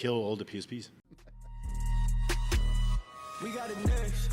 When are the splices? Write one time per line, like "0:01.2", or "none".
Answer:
0:01.4